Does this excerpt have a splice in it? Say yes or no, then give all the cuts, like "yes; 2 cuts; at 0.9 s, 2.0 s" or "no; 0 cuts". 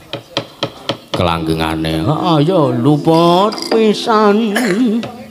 no; 0 cuts